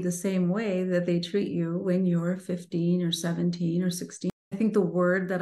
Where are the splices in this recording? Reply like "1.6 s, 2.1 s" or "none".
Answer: 4.3 s